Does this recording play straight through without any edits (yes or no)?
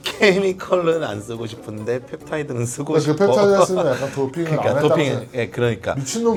yes